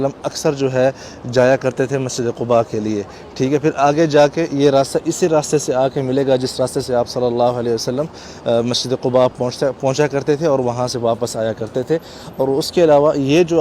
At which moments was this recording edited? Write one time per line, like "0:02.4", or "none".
none

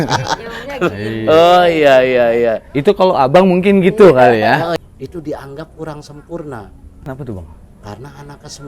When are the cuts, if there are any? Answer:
0:04.8
0:07.1

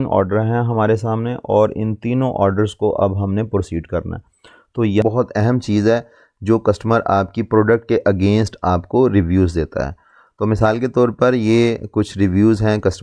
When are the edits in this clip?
0:05.0

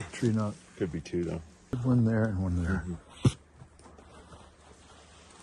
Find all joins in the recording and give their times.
0:01.8

